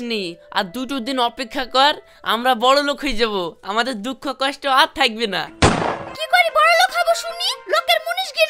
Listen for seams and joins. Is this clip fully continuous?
yes; 0 cuts

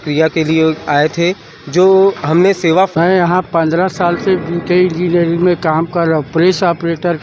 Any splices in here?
yes; 1 cut; at 2.9 s

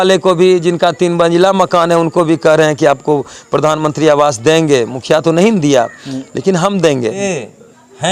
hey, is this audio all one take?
no; 1 cut; at 7.2 s

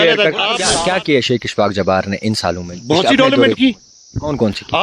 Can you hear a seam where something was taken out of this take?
yes; 1 cut; at 0.9 s

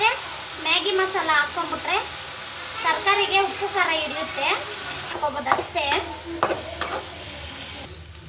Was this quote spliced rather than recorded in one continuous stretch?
yes; 1 cut; at 5.2 s

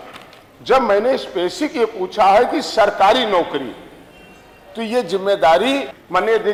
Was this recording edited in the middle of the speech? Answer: no; 0 cuts

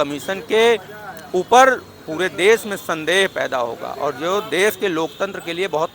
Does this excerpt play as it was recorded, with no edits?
yes; 0 cuts

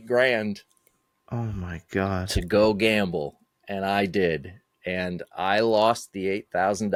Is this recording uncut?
yes; 0 cuts

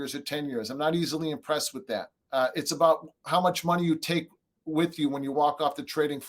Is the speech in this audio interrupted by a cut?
yes; 1 cut; at 2.2 s

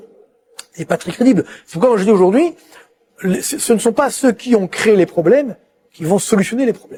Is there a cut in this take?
no; 0 cuts

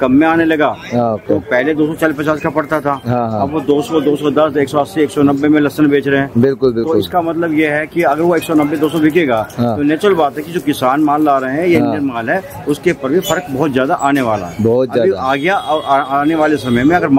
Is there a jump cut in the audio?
no; 0 cuts

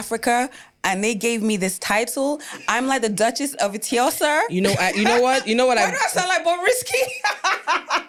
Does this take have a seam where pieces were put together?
no; 0 cuts

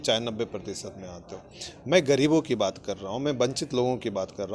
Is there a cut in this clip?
no; 0 cuts

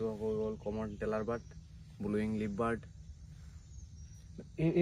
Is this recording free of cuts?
yes; 0 cuts

